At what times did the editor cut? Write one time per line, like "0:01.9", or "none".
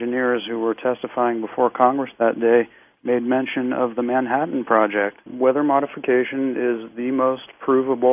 0:03.1